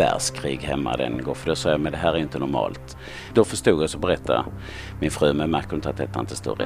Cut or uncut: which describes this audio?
cut